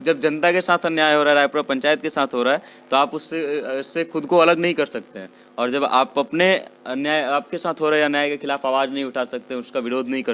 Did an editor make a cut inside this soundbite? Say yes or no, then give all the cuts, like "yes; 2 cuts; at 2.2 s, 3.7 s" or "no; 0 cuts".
no; 0 cuts